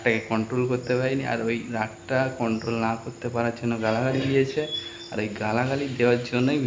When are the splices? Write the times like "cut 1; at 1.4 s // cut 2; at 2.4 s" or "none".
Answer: none